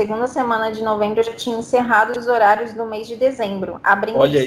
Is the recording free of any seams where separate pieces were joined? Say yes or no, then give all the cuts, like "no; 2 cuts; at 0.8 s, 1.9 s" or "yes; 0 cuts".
yes; 0 cuts